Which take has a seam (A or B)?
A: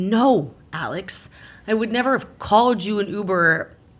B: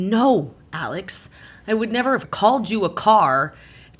B